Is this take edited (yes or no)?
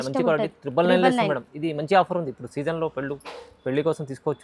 no